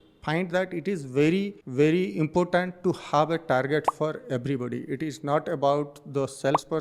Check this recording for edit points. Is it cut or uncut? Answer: cut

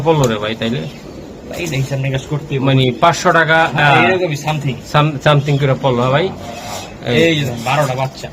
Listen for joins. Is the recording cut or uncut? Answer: uncut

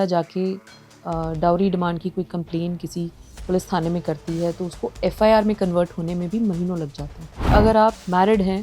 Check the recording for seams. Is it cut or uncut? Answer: cut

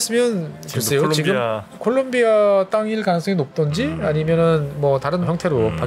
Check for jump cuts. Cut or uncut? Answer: uncut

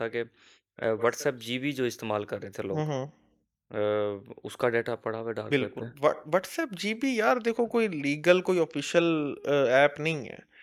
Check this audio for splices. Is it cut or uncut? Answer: uncut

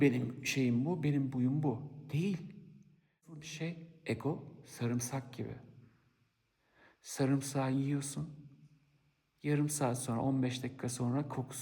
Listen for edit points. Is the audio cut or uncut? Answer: cut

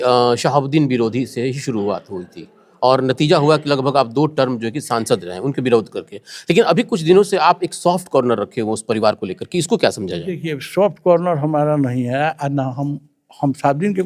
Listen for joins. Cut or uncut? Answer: uncut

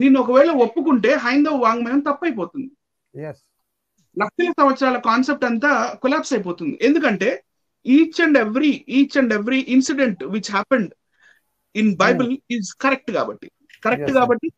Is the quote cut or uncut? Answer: cut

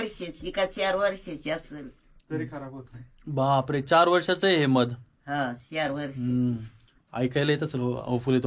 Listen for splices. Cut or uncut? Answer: uncut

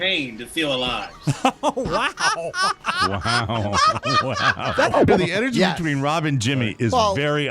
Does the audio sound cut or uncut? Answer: cut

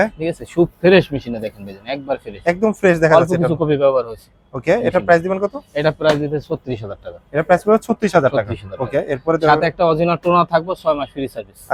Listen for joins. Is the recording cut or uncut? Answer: uncut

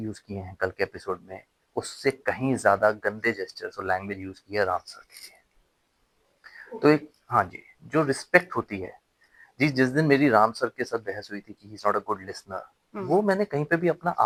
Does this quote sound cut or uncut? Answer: uncut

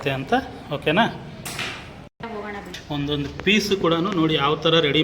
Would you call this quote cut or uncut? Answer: cut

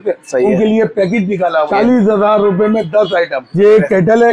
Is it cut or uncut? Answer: cut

